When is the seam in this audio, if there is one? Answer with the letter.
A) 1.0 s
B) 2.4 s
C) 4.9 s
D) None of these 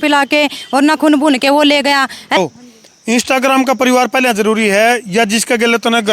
B